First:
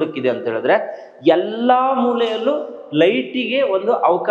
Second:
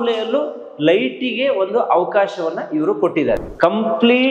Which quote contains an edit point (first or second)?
second